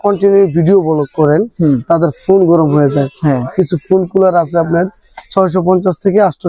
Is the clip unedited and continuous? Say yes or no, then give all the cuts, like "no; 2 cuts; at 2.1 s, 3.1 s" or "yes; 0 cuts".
yes; 0 cuts